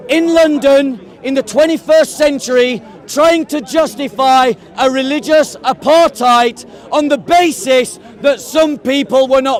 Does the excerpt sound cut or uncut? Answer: uncut